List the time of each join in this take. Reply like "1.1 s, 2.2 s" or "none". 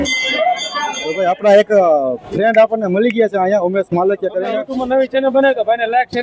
1.0 s, 4.7 s